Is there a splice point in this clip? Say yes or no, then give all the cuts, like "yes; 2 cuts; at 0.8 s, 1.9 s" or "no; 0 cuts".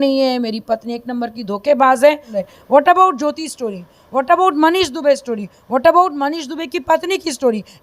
yes; 1 cut; at 2.3 s